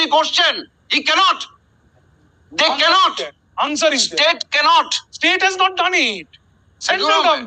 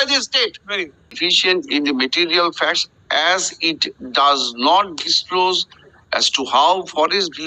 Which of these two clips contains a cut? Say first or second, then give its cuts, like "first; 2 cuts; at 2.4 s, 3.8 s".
second; 1 cut; at 1.0 s